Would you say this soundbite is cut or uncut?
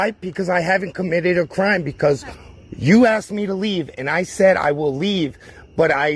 uncut